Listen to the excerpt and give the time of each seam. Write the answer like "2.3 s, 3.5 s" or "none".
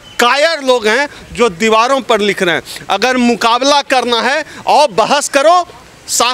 none